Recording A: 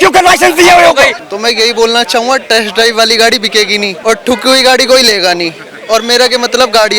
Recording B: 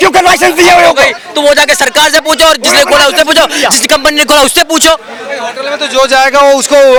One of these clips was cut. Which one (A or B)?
A